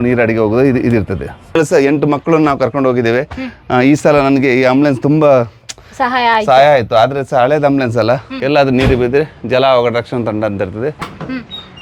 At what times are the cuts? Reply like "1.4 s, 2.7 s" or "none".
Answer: 1.6 s, 8.3 s, 11.0 s